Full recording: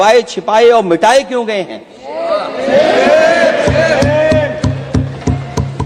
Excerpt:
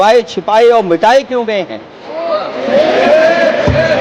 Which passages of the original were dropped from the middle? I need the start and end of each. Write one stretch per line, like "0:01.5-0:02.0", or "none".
none